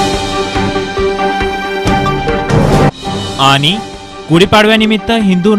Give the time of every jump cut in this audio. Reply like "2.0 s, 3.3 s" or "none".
none